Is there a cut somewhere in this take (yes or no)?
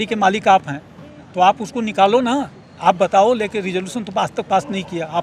no